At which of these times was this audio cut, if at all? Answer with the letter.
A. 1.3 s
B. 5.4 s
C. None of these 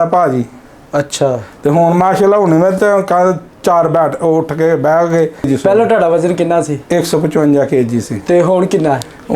C